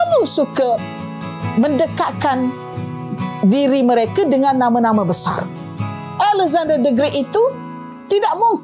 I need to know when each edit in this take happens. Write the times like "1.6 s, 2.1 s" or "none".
none